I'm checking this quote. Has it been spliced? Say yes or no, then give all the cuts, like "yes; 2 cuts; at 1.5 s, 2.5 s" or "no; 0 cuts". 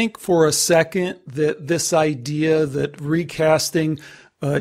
no; 0 cuts